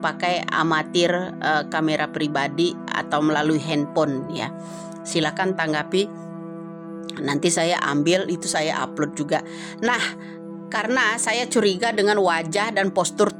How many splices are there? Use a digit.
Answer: 0